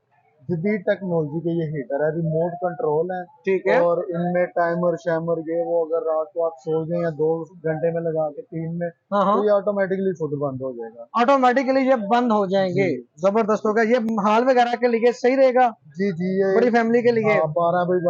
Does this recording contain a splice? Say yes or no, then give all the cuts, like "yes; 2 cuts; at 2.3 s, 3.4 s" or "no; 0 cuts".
no; 0 cuts